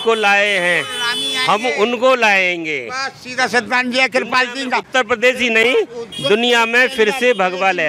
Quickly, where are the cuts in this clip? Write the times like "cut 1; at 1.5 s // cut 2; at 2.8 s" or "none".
none